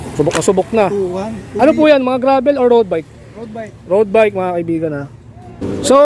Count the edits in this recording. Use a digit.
0